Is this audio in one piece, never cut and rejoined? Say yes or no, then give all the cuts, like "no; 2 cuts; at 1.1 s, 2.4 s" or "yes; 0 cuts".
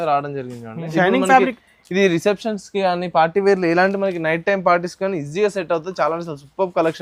no; 1 cut; at 0.9 s